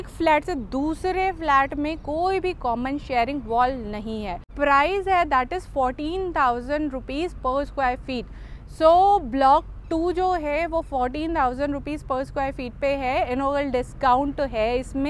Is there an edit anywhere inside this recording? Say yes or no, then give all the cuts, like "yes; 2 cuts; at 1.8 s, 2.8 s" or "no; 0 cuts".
yes; 1 cut; at 4.5 s